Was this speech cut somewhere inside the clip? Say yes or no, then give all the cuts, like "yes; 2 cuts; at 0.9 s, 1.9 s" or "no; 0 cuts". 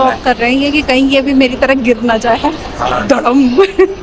yes; 1 cut; at 2.7 s